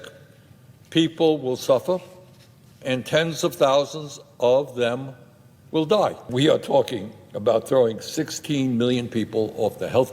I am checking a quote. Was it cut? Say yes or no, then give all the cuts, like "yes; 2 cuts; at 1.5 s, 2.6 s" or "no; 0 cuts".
yes; 1 cut; at 6.3 s